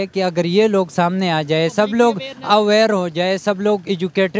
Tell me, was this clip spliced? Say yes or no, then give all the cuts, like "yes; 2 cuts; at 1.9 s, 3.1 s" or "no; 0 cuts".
no; 0 cuts